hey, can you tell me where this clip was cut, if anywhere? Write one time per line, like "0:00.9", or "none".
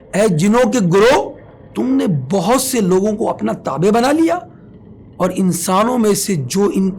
none